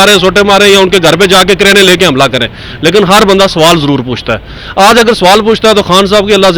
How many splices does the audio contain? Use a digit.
0